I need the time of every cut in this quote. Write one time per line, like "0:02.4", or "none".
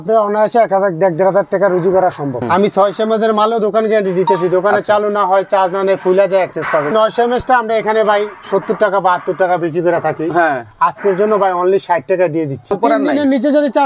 0:02.4
0:06.9
0:12.7

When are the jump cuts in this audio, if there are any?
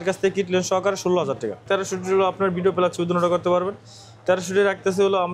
0:01.6

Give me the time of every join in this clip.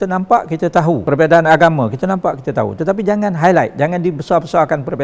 0:01.0

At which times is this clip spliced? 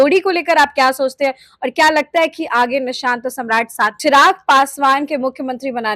0:04.0

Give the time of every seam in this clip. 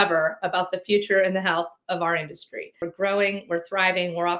0:02.9

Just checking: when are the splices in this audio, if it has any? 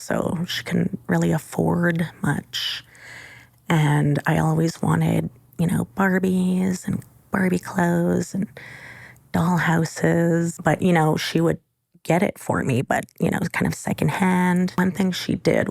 0:10.5
0:14.8

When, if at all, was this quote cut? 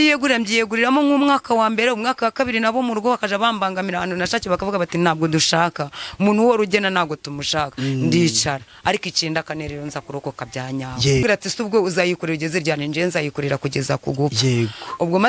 0:11.2

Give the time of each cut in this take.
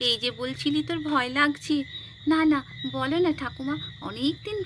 none

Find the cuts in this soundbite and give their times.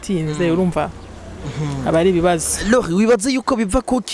none

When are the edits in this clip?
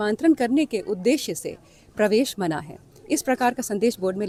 none

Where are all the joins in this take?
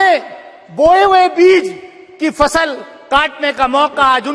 none

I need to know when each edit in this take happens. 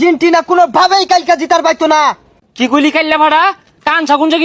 0:02.3

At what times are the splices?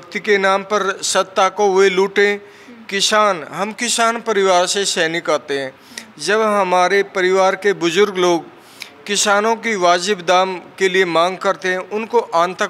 none

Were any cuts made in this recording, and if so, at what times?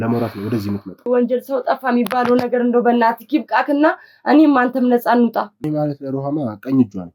0:01.1
0:05.6

